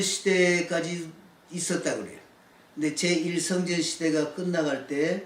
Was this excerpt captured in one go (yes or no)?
yes